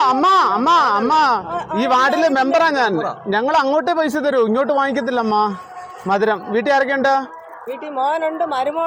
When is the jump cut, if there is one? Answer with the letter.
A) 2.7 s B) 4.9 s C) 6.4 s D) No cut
D